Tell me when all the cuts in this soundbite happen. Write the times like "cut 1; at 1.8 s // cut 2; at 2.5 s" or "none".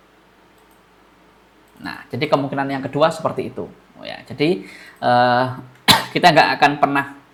none